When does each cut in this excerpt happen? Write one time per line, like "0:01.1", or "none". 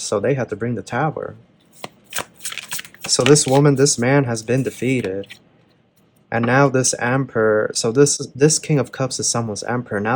none